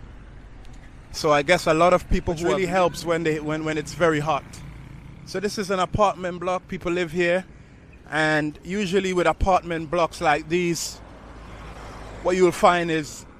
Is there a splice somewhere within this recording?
yes; 1 cut; at 2.4 s

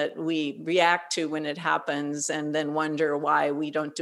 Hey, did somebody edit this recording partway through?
no; 0 cuts

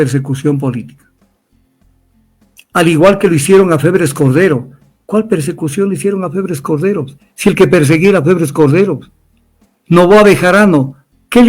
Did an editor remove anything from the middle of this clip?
no; 0 cuts

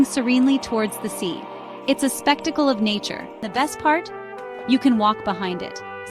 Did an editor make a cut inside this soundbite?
yes; 1 cut; at 3.5 s

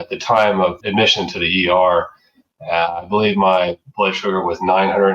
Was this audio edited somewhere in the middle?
no; 0 cuts

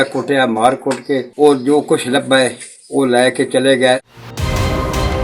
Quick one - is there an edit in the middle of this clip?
yes; 2 cuts; at 1.3 s, 4.0 s

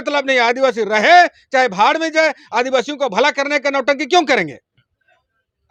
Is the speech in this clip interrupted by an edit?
no; 0 cuts

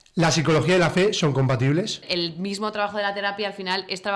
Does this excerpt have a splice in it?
yes; 1 cut; at 2.0 s

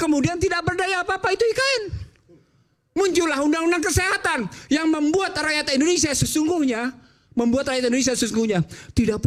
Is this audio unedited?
yes; 0 cuts

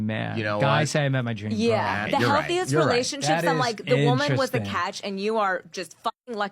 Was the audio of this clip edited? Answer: yes; 1 cut; at 3.4 s

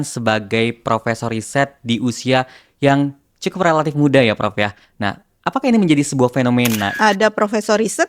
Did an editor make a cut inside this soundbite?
yes; 1 cut; at 6.9 s

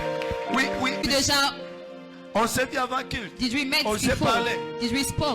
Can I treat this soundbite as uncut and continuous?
no; 1 cut; at 1.0 s

